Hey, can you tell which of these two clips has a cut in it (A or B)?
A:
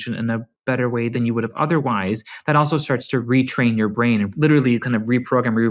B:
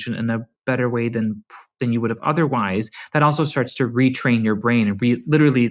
A